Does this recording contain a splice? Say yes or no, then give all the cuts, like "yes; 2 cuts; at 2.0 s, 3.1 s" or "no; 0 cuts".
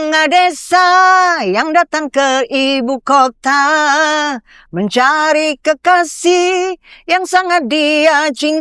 no; 0 cuts